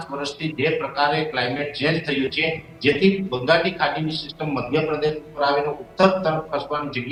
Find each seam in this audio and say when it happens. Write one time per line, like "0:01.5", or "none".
none